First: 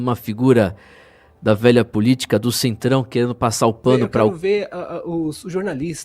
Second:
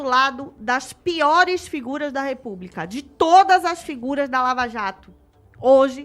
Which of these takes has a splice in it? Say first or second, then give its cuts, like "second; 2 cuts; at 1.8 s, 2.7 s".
first; 1 cut; at 4.3 s